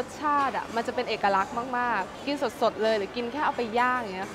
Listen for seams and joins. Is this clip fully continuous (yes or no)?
yes